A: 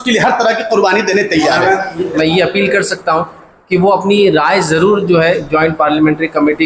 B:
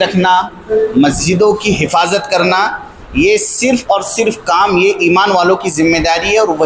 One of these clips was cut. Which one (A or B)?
A